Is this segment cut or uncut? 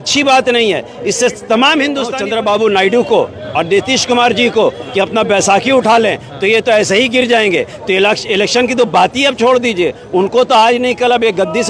cut